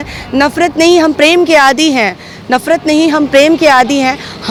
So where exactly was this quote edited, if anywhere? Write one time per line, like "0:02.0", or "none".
none